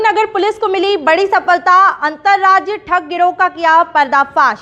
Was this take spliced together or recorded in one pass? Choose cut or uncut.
uncut